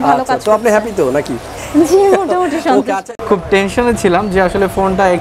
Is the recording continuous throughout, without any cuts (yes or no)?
no